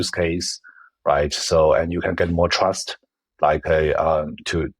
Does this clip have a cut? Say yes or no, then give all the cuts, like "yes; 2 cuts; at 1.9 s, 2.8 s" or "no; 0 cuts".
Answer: no; 0 cuts